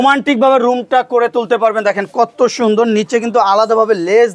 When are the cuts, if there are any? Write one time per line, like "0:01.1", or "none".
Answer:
none